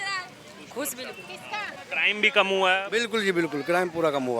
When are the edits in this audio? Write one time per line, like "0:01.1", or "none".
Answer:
0:01.8